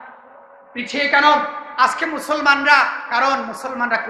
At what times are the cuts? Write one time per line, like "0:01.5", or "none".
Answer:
none